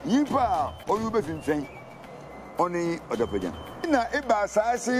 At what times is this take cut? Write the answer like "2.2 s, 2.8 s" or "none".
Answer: 3.9 s